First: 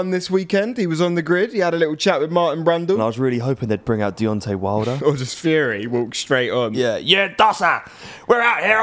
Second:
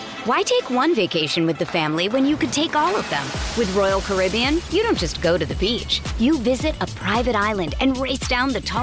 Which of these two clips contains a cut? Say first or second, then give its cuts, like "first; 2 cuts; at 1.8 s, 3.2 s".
first; 3 cuts; at 3.0 s, 5.0 s, 6.7 s